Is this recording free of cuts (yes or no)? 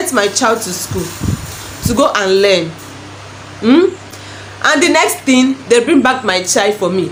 yes